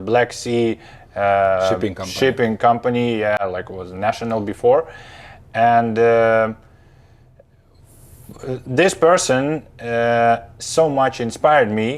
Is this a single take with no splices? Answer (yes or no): yes